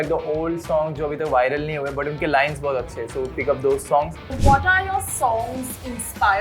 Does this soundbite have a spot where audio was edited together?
yes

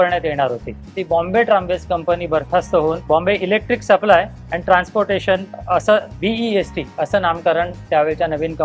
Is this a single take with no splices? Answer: no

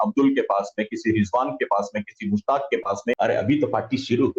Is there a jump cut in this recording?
yes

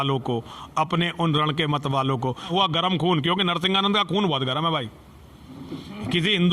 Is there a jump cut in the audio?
yes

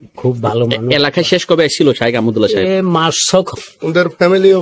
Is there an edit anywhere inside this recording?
yes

